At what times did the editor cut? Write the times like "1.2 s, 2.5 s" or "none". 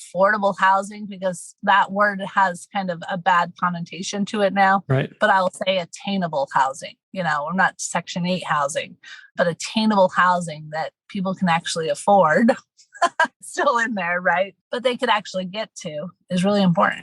13.4 s, 16.1 s